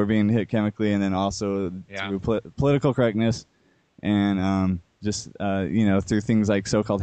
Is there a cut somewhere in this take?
no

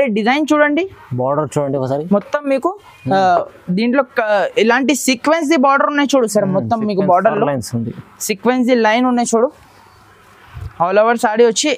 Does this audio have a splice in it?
no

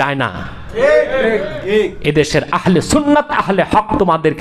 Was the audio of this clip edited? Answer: no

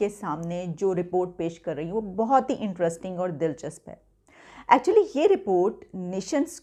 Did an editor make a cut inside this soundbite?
no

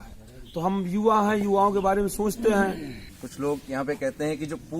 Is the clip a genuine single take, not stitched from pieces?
no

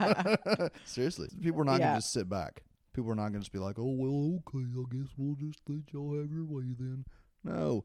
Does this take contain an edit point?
yes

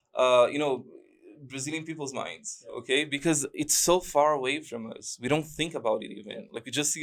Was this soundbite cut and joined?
no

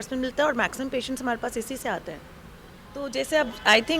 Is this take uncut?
no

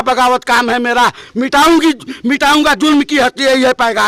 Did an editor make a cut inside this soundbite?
no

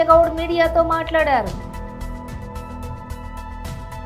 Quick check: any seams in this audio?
yes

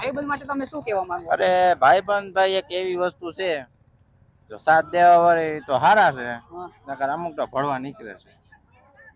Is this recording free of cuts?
yes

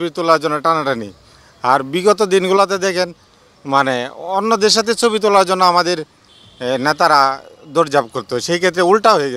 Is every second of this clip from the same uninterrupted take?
yes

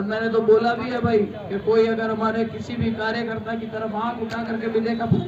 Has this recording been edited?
no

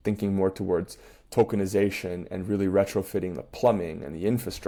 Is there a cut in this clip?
no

